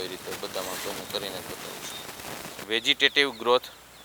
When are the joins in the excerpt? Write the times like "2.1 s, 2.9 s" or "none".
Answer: 2.6 s